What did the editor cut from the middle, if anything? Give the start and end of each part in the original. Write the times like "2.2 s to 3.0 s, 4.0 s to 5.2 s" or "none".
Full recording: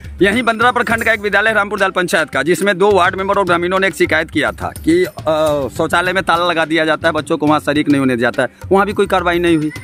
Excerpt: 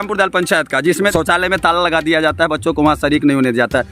2.7 s to 5.8 s

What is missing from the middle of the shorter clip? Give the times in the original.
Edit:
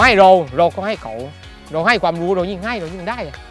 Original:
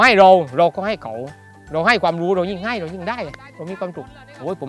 none

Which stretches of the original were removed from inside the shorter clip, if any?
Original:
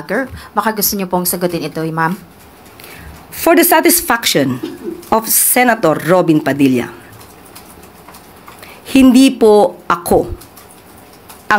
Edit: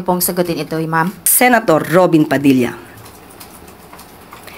2.3 s to 5.4 s

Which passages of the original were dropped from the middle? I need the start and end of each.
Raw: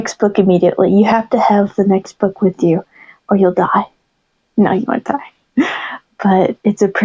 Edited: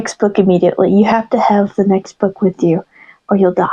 none

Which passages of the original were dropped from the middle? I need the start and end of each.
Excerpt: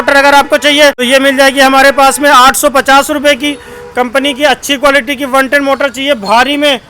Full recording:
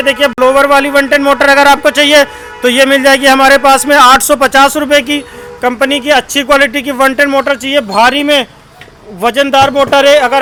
2.3 s to 2.7 s

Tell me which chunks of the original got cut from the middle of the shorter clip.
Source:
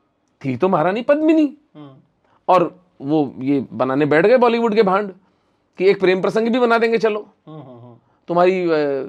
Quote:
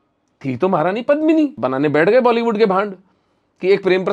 1.6 s to 3.7 s

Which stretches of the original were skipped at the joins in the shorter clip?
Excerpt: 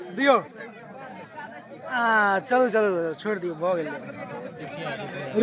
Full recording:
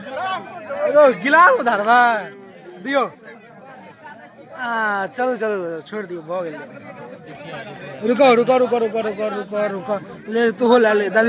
none

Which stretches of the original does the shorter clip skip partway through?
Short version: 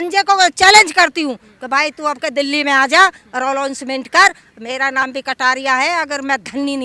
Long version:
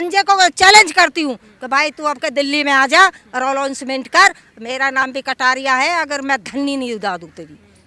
none

